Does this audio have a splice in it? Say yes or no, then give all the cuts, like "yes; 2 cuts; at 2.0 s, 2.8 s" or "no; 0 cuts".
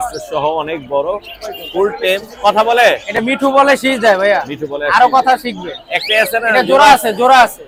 no; 0 cuts